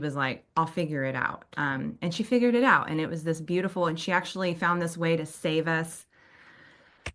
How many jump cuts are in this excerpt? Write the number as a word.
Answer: zero